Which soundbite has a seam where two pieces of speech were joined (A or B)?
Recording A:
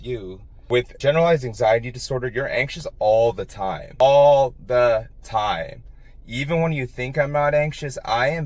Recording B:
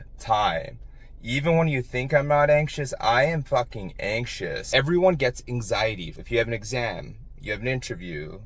B